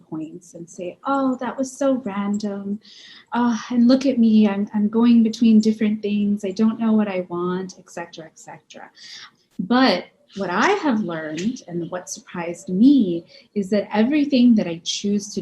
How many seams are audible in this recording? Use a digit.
1